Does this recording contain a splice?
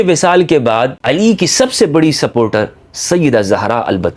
yes; 1 cut; at 1.0 s

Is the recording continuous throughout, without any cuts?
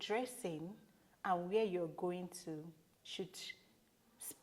yes; 0 cuts

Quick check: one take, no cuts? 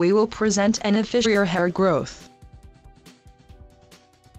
yes; 0 cuts

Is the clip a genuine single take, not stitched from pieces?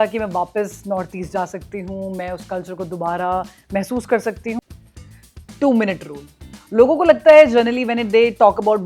no; 1 cut; at 4.6 s

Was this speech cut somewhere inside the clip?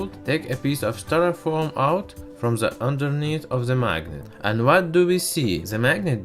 yes; 1 cut; at 1.4 s

